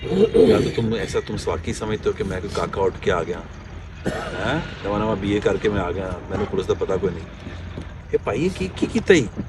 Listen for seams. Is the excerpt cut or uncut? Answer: uncut